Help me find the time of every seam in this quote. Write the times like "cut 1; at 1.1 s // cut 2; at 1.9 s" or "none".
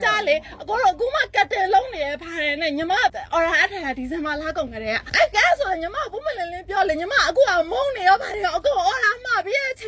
cut 1; at 3.2 s // cut 2; at 5.1 s